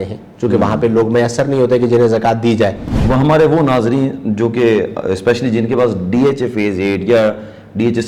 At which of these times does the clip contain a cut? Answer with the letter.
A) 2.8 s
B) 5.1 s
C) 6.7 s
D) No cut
A